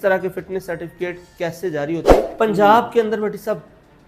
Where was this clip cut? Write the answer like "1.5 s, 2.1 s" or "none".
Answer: 2.3 s

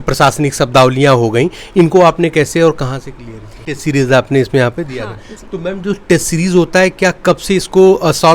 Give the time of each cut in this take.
3.7 s

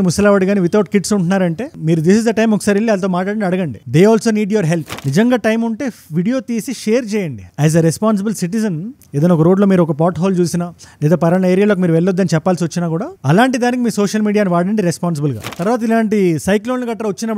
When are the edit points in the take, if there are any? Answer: 4.9 s, 15.4 s

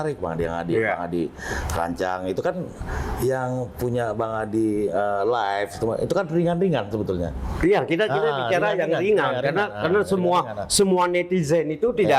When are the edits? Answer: none

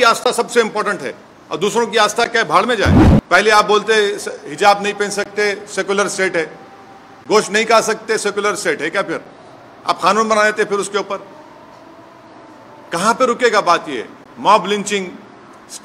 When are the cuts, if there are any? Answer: 3.1 s

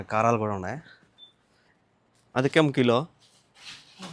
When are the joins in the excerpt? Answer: none

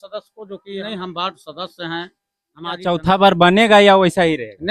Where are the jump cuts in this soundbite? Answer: 0.8 s, 2.9 s

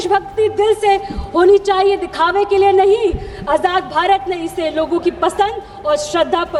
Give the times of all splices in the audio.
none

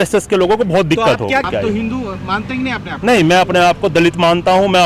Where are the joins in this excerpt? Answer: 1.5 s

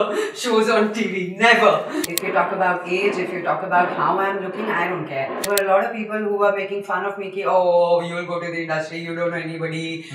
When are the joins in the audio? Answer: 2.0 s, 5.5 s

